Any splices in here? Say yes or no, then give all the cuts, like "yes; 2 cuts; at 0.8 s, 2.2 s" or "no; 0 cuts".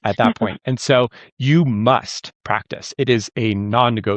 no; 0 cuts